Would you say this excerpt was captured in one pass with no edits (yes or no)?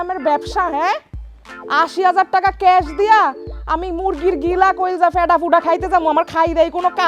yes